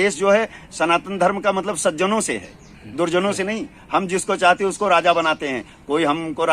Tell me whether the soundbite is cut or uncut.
uncut